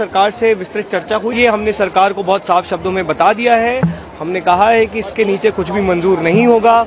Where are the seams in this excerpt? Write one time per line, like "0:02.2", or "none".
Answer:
0:01.3

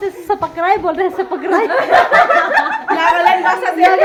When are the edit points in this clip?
none

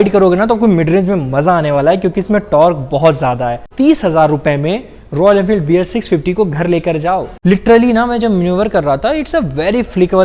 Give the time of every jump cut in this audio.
0:03.6
0:07.3

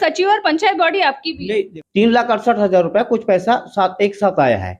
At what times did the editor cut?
0:01.6

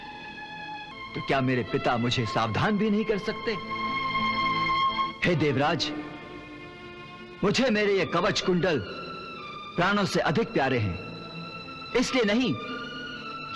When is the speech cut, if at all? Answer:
0:00.9
0:05.1

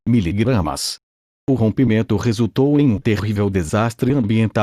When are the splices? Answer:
0:01.4

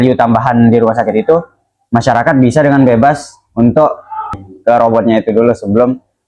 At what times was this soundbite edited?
0:04.4

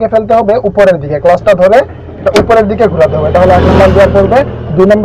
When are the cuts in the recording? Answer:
none

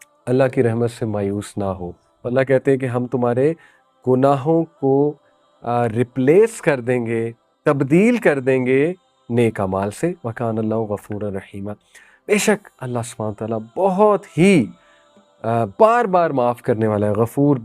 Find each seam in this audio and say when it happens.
0:01.5

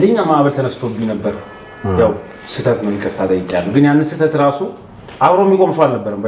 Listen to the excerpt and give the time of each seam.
none

